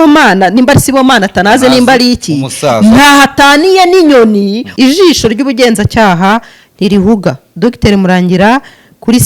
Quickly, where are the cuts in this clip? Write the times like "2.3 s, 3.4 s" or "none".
4.6 s

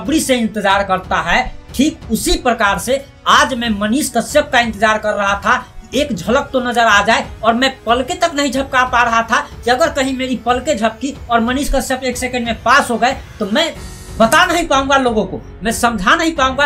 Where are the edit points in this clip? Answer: none

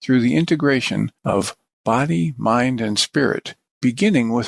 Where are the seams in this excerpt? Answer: 1.2 s

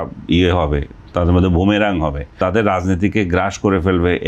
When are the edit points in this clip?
2.4 s

